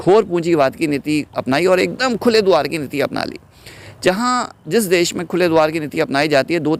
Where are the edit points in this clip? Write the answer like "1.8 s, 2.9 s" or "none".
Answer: none